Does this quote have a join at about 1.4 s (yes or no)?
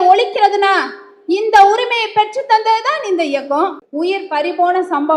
no